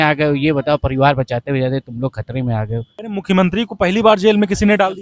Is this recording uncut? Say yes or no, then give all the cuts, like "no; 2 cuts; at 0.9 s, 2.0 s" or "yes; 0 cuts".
no; 1 cut; at 2.9 s